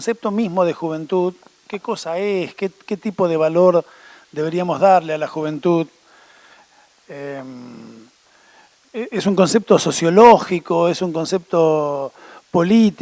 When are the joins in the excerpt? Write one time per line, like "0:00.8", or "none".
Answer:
none

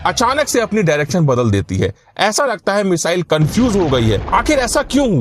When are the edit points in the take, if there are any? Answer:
0:04.2

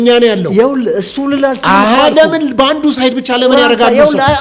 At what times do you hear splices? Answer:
none

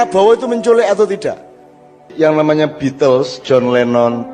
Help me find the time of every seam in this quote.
0:02.1

